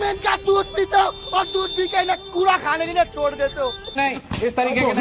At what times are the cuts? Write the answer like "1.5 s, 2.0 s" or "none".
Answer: 4.0 s